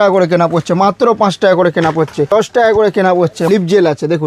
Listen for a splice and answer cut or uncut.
cut